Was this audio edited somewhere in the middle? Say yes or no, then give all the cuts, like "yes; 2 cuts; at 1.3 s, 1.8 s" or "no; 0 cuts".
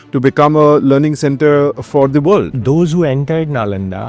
yes; 1 cut; at 2.5 s